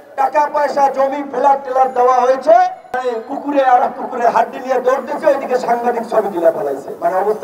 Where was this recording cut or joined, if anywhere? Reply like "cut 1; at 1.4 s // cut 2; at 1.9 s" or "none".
cut 1; at 2.9 s